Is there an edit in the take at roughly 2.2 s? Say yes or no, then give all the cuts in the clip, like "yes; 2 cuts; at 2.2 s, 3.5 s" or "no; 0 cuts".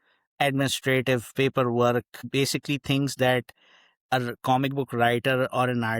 yes; 1 cut; at 2.2 s